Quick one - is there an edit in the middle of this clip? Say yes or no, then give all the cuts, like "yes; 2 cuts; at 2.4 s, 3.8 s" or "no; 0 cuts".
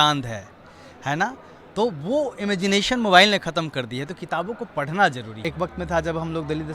yes; 1 cut; at 5.4 s